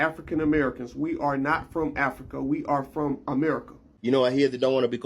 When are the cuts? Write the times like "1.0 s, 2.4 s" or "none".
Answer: 3.9 s